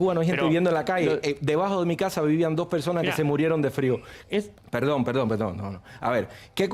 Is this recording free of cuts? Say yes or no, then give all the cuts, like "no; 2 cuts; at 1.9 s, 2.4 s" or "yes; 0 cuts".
yes; 0 cuts